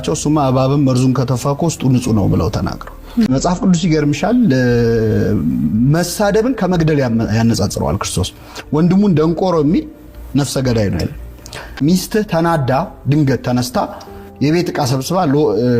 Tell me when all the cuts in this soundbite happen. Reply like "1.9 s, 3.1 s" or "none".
3.3 s, 11.8 s